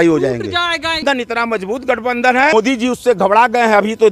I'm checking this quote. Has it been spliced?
yes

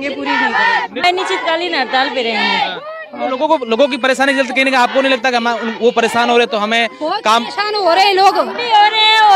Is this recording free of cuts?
no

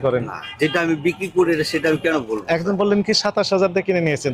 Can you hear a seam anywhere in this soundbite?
no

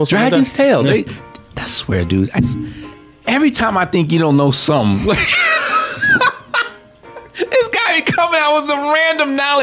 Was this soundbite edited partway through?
yes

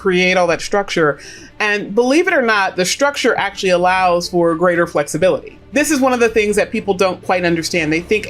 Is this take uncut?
no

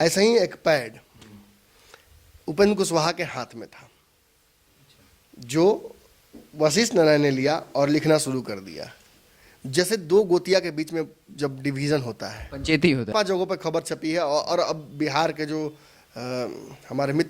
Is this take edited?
yes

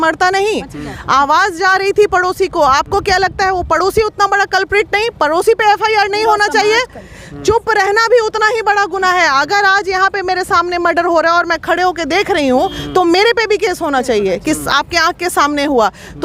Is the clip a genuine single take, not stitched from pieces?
yes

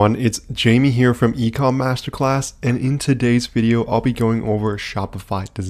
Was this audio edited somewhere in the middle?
no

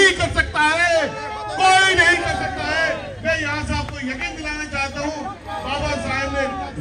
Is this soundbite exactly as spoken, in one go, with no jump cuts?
yes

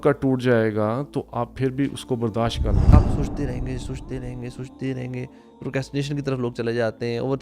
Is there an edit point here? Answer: yes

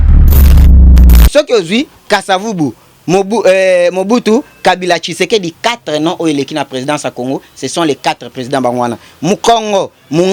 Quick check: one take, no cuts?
no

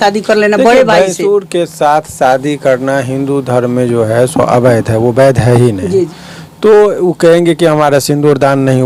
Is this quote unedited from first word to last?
yes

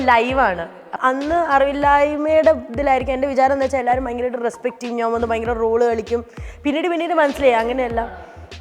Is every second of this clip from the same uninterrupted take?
no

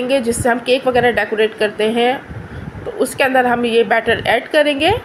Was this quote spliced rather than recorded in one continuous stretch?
no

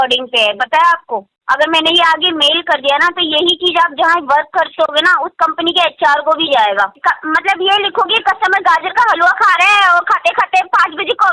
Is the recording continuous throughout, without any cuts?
no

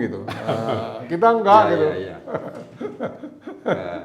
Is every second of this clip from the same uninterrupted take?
yes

